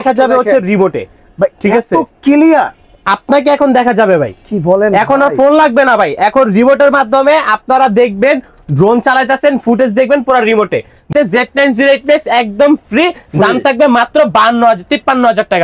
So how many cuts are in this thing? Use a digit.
1